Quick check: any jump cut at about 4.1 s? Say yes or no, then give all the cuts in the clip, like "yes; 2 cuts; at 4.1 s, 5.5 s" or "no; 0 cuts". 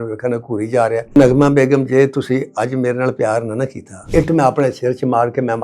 yes; 2 cuts; at 1.2 s, 4.1 s